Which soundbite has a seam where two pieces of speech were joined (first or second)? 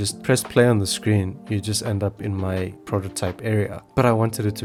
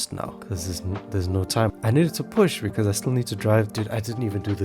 second